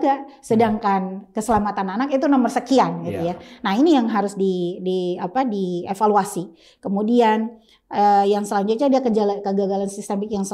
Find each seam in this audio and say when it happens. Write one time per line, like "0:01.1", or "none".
none